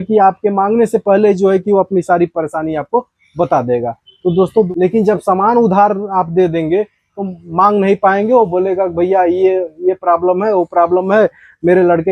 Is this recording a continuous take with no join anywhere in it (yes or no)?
no